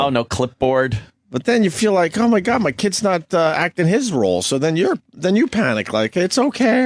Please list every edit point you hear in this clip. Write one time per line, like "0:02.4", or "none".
0:03.9